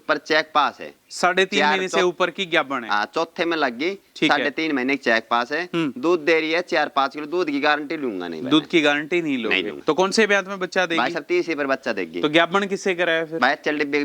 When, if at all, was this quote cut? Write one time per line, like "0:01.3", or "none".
0:09.7